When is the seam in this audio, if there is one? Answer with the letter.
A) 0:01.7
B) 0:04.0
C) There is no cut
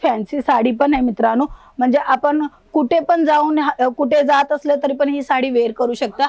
C